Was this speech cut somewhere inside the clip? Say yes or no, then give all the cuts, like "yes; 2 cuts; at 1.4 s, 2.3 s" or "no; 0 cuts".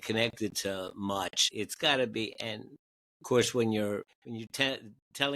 yes; 2 cuts; at 1.4 s, 4.2 s